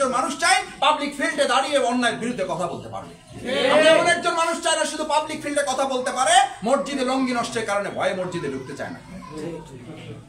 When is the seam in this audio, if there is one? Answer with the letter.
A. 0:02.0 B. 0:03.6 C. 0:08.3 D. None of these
D